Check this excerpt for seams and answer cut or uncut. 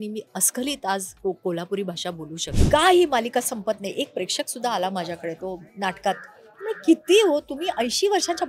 cut